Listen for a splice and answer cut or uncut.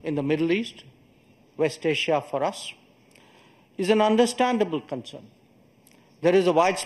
uncut